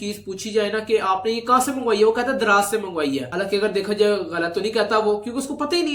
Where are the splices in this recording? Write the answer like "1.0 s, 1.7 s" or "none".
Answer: none